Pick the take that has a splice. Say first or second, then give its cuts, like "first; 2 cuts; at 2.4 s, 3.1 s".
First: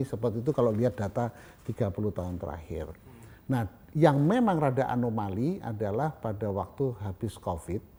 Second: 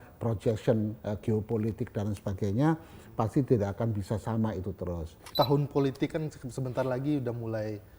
second; 1 cut; at 5.2 s